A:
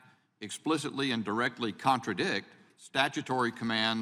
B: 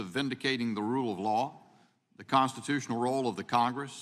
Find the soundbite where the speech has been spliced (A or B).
B